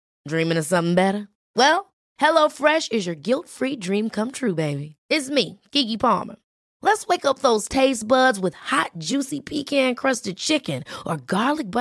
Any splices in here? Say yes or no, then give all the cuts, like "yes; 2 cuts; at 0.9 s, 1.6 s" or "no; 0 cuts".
no; 0 cuts